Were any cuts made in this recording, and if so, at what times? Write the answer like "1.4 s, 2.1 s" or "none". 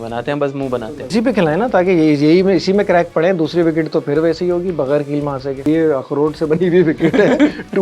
1.1 s, 5.6 s